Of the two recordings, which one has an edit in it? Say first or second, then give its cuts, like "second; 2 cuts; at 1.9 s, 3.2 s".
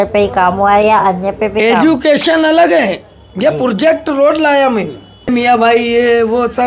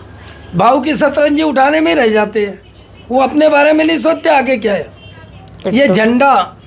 first; 1 cut; at 5.3 s